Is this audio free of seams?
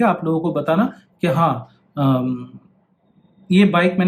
yes; 0 cuts

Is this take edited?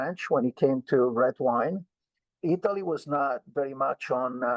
no; 0 cuts

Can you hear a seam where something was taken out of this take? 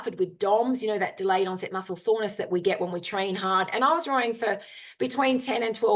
no; 0 cuts

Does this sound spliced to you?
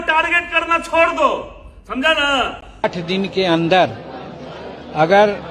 no; 0 cuts

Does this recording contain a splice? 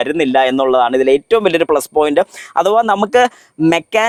no; 0 cuts

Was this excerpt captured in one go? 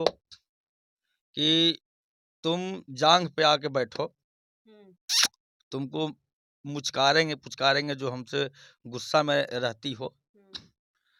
yes; 0 cuts

